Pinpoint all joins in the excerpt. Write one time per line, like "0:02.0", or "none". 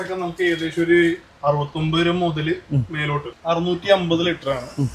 0:03.3

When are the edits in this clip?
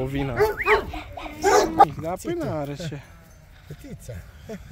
0:01.8

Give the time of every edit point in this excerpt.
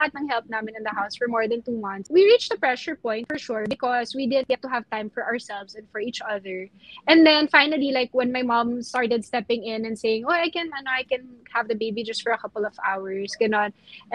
0:02.0

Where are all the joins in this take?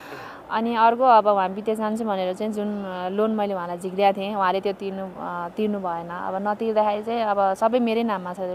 none

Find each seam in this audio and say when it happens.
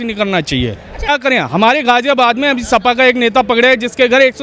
0:01.1

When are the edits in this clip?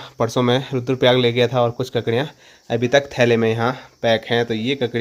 none

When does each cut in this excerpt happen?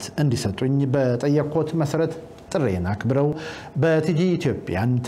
0:03.2

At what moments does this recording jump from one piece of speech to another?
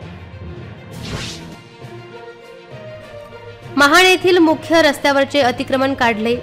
0:00.9

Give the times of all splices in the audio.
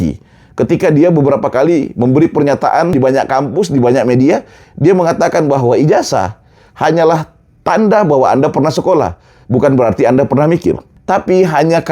0:02.9
0:10.9

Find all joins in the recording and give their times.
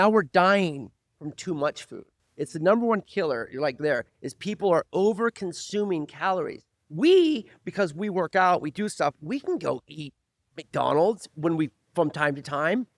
none

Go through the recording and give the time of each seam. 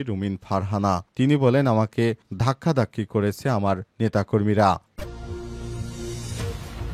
0:04.9

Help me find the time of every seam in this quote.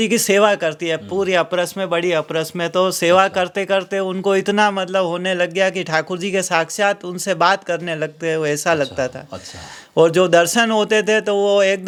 none

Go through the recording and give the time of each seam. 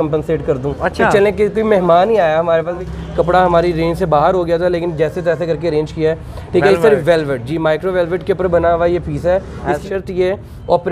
0:02.8
0:09.8

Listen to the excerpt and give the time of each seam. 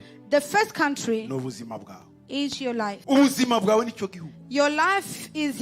0:03.0

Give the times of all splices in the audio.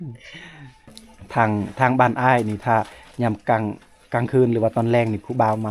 0:01.0

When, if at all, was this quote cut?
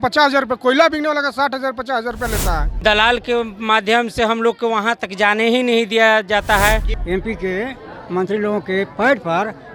0:02.8
0:06.9

